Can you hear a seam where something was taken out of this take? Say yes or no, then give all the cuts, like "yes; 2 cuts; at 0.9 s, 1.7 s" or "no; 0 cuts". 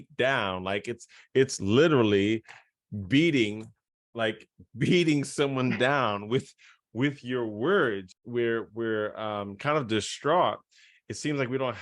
yes; 1 cut; at 8.1 s